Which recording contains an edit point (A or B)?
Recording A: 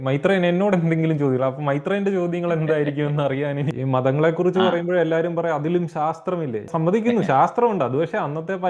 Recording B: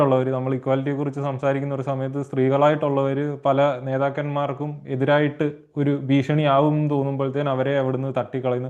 A